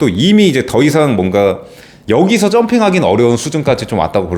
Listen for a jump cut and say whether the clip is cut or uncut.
uncut